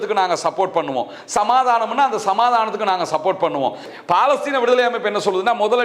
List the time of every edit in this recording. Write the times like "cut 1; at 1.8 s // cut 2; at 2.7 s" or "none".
cut 1; at 3.8 s